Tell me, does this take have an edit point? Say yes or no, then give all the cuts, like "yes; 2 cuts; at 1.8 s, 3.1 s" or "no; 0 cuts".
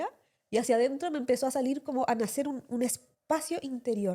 no; 0 cuts